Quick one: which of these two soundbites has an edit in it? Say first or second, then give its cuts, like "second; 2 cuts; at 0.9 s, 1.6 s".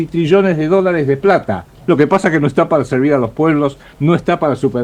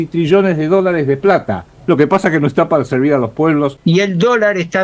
second; 1 cut; at 3.8 s